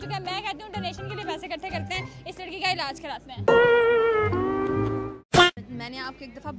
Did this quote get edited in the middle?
no; 0 cuts

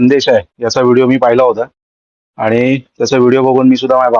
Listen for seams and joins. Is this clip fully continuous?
yes; 0 cuts

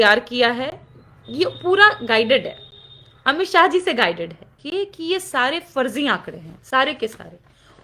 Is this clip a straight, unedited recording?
no; 1 cut; at 4.6 s

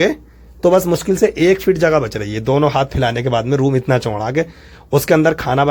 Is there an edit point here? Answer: no; 0 cuts

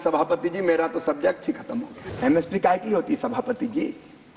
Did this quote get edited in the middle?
yes; 1 cut; at 2.0 s

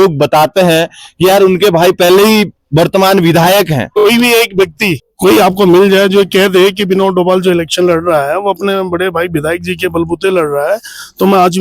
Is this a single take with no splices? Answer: no; 2 cuts; at 3.9 s, 5.1 s

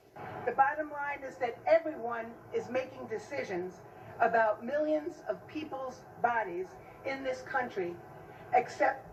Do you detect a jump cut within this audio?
no; 0 cuts

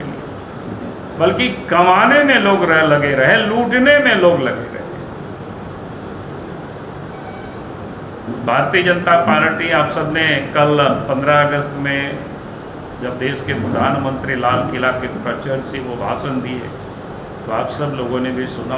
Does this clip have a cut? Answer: no; 0 cuts

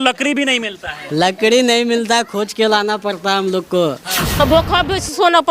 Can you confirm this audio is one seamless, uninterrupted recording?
no; 1 cut; at 4.4 s

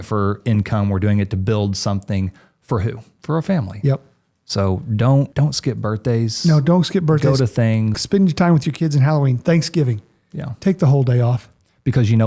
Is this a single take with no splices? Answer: no; 3 cuts; at 3.1 s, 5.3 s, 7.9 s

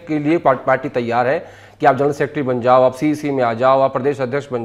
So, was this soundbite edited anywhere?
no; 0 cuts

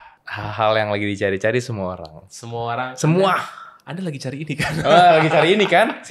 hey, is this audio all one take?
yes; 0 cuts

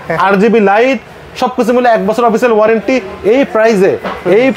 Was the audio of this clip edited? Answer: no; 0 cuts

